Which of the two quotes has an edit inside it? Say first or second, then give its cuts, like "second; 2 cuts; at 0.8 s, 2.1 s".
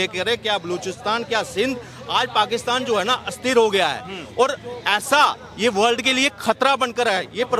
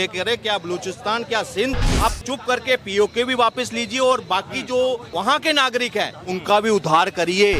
second; 3 cuts; at 1.9 s, 5.1 s, 6.2 s